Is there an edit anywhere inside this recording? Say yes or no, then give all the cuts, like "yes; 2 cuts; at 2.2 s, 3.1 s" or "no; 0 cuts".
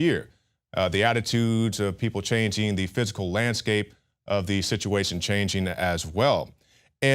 yes; 1 cut; at 5.9 s